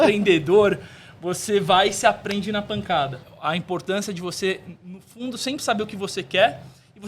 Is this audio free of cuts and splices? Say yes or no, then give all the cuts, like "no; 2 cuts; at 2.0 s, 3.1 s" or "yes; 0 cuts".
no; 1 cut; at 3.3 s